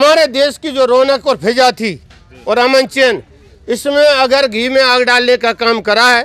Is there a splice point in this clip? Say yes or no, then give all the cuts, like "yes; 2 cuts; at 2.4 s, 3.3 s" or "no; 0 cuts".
no; 0 cuts